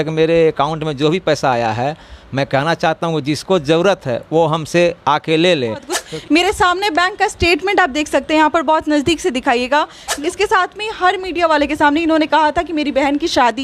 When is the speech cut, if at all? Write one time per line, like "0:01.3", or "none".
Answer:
0:06.0
0:10.0